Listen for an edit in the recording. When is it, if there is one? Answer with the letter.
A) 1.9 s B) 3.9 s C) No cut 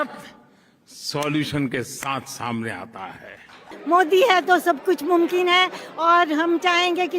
B